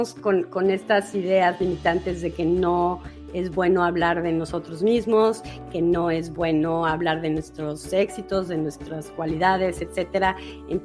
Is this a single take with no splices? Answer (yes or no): yes